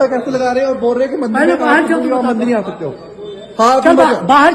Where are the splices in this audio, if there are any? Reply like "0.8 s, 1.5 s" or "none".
1.2 s

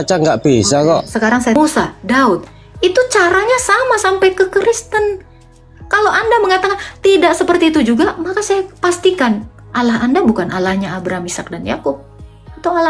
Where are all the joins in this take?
1.6 s

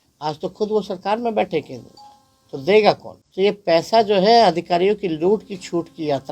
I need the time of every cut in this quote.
3.1 s

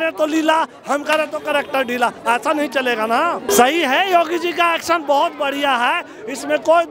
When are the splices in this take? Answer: 3.5 s

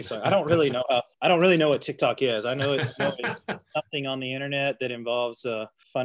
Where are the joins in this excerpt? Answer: 1.1 s

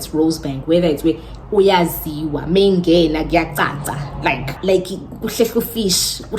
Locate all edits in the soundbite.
4.5 s

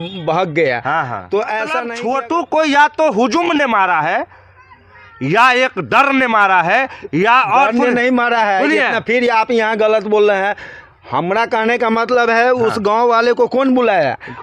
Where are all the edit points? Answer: 1.9 s

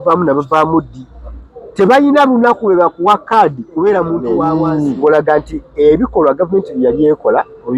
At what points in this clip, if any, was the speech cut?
4.4 s

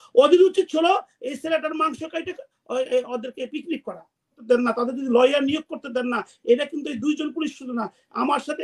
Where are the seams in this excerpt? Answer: 4.4 s

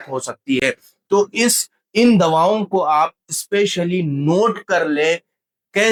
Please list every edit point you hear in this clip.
none

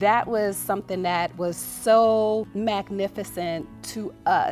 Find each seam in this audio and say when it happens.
2.5 s

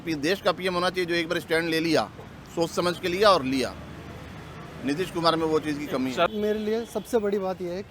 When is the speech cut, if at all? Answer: 6.3 s

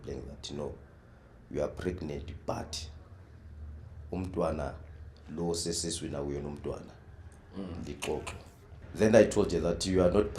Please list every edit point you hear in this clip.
8.8 s

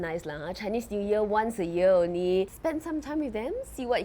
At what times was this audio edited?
2.5 s

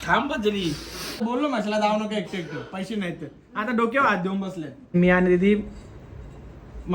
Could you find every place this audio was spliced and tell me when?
1.2 s, 4.9 s

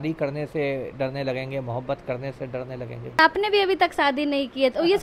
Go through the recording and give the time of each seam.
3.2 s

